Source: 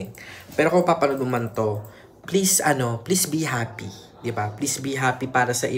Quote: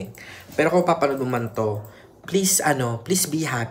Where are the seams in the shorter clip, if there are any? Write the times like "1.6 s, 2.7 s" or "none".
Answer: none